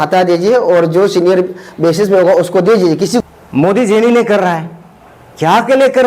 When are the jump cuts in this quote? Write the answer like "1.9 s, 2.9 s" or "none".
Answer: 3.2 s